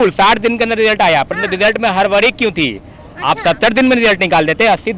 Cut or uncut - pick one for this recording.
uncut